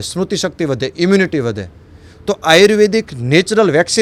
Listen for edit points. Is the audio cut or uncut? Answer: uncut